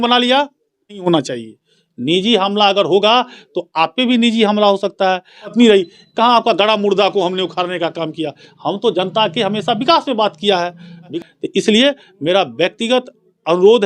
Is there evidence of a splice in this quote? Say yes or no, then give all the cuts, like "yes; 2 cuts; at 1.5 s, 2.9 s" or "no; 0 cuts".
yes; 3 cuts; at 1.0 s, 5.5 s, 11.1 s